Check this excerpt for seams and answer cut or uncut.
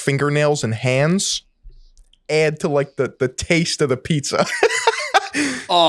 uncut